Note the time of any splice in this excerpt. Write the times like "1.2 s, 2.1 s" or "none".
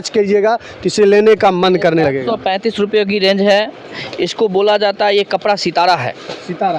none